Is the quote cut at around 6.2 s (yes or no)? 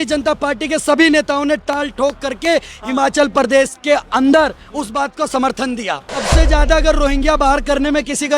yes